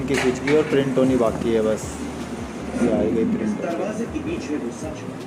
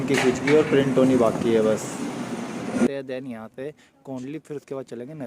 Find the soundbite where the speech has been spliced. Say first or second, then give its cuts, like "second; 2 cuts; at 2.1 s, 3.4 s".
second; 1 cut; at 2.9 s